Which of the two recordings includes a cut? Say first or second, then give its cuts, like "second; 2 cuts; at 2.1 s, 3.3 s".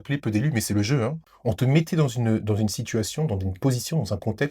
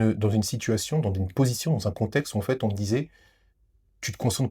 first; 1 cut; at 1.3 s